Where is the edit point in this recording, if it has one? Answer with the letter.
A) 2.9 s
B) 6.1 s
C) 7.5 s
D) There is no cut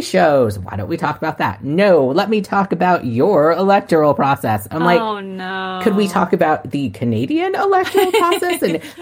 D